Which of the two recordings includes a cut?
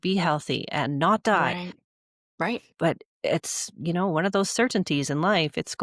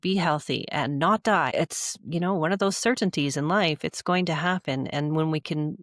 second; 1 cut; at 1.5 s

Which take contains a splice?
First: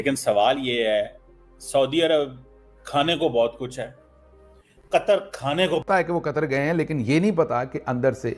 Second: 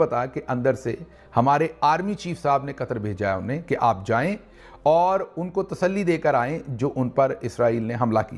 first; 1 cut; at 5.9 s

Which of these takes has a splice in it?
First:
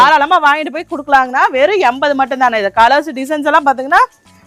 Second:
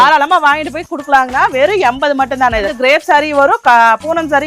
second; 1 cut; at 2.7 s

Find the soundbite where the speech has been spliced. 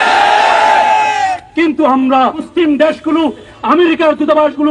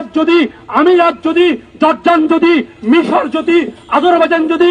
first; 2 cuts; at 2.4 s, 3.5 s

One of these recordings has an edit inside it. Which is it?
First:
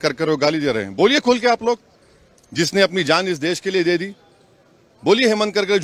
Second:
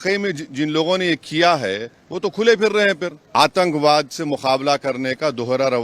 second; 1 cut; at 3.2 s

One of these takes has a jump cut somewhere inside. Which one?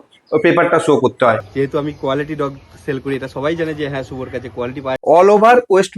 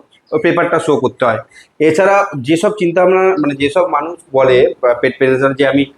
first; 2 cuts; at 1.5 s, 5.0 s

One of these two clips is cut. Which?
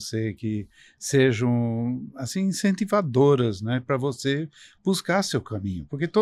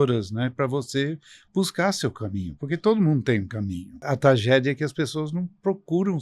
second; 1 cut; at 4.0 s

